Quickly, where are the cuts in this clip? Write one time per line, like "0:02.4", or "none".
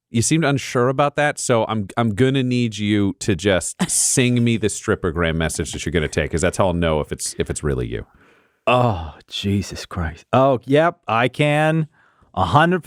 none